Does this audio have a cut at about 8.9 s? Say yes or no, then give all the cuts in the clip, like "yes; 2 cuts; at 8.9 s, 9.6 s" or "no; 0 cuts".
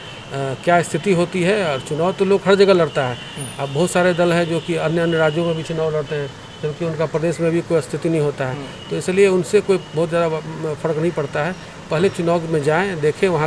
no; 0 cuts